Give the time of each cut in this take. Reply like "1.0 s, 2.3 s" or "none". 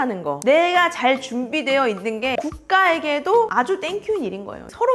none